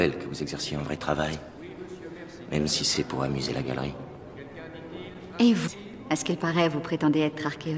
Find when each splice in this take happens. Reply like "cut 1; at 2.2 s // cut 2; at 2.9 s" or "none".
cut 1; at 6.7 s